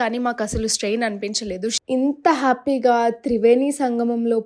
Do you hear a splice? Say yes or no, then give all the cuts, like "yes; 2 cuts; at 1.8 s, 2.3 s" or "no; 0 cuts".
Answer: yes; 1 cut; at 1.8 s